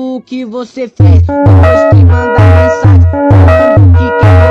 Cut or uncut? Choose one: uncut